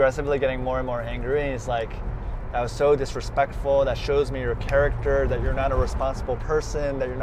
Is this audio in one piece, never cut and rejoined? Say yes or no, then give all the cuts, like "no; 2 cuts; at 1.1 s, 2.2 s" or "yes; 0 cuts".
yes; 0 cuts